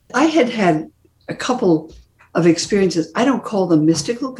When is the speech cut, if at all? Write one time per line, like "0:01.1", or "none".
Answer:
none